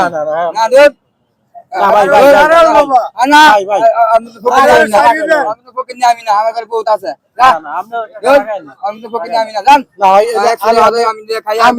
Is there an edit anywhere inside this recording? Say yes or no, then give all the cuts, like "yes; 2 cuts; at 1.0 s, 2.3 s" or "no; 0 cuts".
no; 0 cuts